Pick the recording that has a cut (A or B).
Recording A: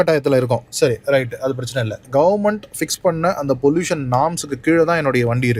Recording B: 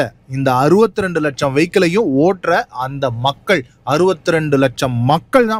A